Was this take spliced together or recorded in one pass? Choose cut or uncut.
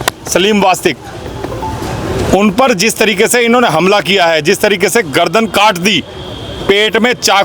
uncut